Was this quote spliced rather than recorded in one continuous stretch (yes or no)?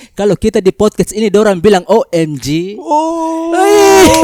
no